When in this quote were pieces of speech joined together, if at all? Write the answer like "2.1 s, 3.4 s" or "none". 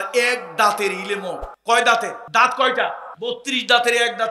1.5 s, 2.2 s, 3.1 s